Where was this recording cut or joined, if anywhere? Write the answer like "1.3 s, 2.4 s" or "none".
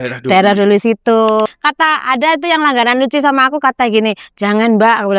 1.5 s